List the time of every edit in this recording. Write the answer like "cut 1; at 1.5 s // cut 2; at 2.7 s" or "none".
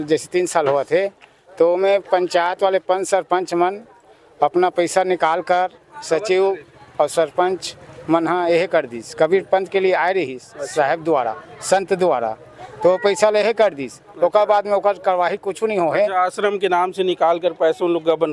none